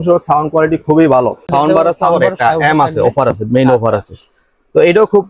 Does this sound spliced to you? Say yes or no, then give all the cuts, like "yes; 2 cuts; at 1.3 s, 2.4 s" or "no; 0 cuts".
yes; 1 cut; at 1.5 s